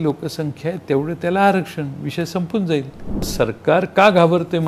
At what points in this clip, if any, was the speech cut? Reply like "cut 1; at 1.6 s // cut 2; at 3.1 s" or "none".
cut 1; at 3.3 s